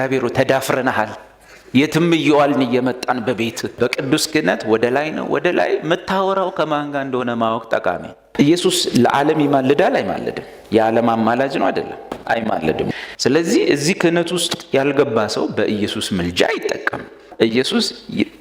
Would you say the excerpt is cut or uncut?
cut